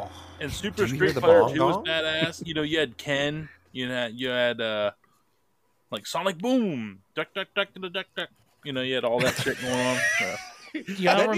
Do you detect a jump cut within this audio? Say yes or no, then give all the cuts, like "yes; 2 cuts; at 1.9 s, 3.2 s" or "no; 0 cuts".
no; 0 cuts